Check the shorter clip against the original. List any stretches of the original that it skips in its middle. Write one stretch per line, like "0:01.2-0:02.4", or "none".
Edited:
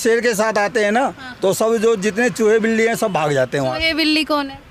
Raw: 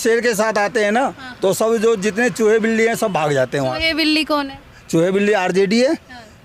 none